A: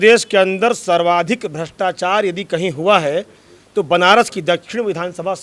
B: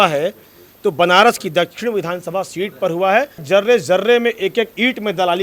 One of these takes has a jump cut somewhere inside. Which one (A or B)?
B